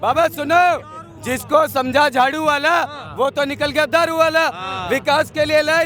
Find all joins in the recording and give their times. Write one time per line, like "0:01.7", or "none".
none